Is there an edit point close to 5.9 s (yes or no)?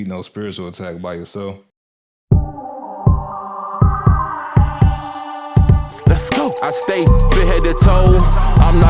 no